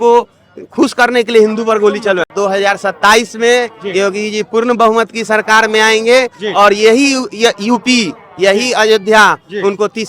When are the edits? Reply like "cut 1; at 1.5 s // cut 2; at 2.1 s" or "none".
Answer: cut 1; at 2.3 s